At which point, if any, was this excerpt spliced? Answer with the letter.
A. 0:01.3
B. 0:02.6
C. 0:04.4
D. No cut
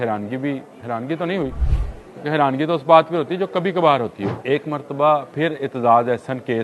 C